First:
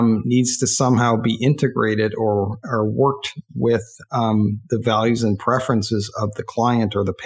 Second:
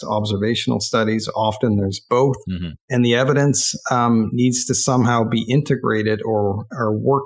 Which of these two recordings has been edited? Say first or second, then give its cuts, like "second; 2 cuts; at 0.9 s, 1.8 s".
second; 1 cut; at 2.8 s